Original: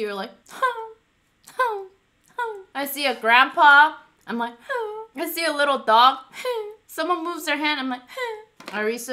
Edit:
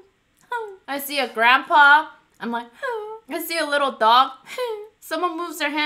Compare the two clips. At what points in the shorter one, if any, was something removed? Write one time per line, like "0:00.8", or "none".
none